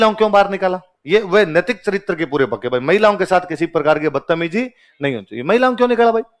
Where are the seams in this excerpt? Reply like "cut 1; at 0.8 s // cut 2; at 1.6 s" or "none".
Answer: none